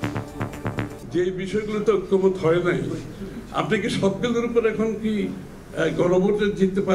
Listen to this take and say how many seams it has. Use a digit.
1